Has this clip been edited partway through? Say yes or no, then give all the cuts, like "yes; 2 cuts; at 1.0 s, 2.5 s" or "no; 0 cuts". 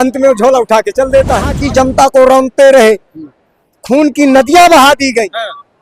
yes; 1 cut; at 1.6 s